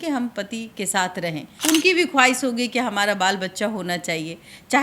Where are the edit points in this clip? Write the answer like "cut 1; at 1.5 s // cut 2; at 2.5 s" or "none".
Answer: cut 1; at 1.5 s